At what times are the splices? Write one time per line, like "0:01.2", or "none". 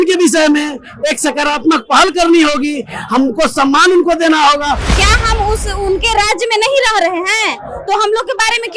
0:04.9